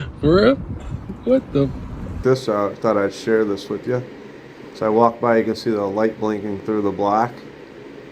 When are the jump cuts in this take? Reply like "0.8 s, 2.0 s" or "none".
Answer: 2.2 s